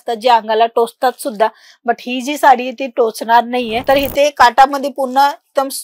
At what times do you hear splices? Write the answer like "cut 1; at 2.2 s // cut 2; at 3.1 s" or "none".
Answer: cut 1; at 3.8 s

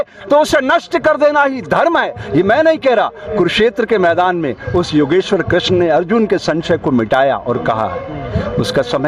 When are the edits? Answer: none

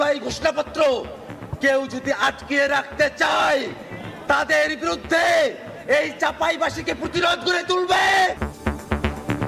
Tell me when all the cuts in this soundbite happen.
cut 1; at 8.5 s

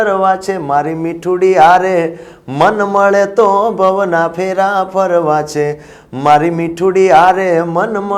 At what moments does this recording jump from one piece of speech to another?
none

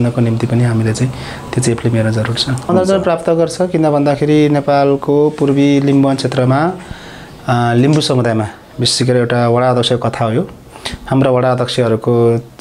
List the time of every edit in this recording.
cut 1; at 2.7 s

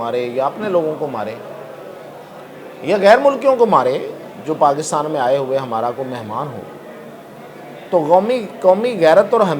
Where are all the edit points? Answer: none

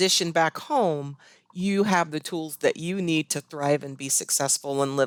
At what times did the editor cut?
none

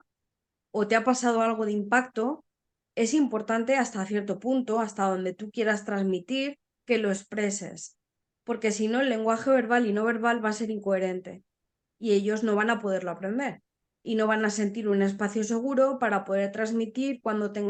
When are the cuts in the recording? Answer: none

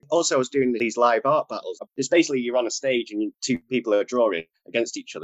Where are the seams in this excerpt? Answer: cut 1; at 0.8 s // cut 2; at 1.8 s // cut 3; at 3.6 s

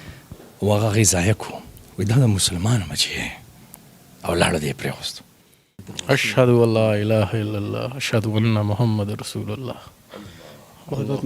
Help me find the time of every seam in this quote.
cut 1; at 5.8 s

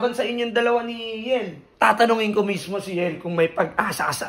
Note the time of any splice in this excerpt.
none

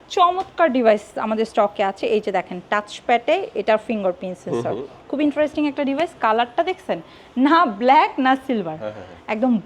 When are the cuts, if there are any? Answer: none

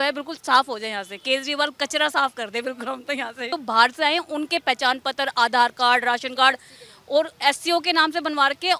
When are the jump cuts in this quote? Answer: cut 1; at 3.5 s

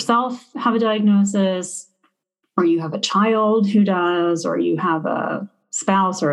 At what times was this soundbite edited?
none

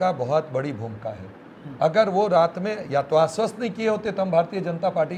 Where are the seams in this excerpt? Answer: none

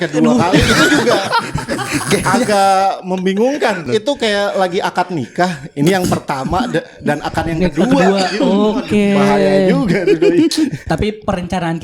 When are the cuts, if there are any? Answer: cut 1; at 3.8 s // cut 2; at 10.8 s

